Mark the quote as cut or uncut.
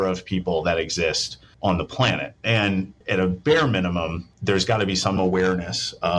cut